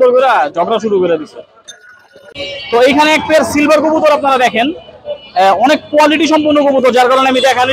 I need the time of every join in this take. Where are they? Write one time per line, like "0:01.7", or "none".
0:02.3